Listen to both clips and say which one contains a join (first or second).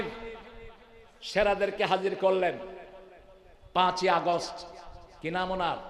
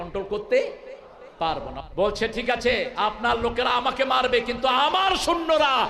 second